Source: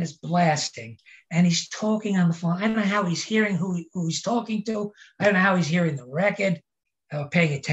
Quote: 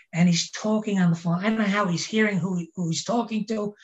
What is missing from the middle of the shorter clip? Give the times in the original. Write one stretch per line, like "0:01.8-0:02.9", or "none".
none